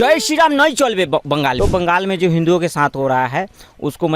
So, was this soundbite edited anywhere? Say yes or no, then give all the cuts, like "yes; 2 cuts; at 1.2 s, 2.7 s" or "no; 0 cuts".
yes; 1 cut; at 1.6 s